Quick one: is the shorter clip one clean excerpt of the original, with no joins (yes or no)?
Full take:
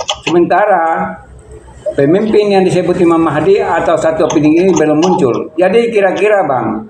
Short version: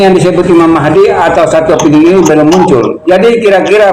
yes